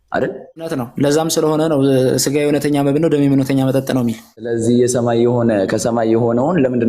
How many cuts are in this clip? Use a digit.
2